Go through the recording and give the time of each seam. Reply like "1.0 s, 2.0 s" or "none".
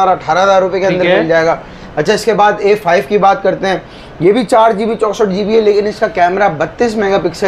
none